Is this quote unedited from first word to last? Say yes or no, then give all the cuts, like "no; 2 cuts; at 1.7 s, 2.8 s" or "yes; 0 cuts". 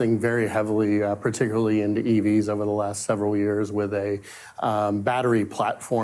yes; 0 cuts